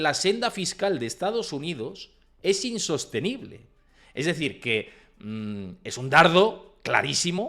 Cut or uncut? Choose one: uncut